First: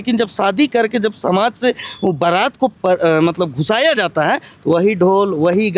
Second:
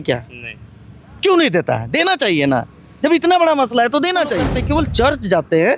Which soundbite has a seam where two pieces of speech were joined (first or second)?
second